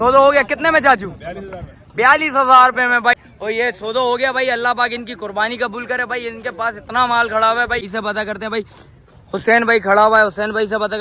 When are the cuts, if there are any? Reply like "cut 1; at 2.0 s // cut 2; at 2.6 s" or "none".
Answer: none